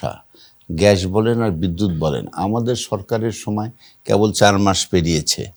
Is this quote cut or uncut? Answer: uncut